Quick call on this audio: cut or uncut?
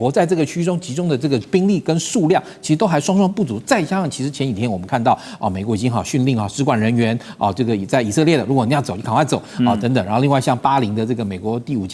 uncut